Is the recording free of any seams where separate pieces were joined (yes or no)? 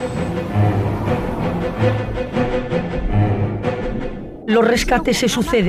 no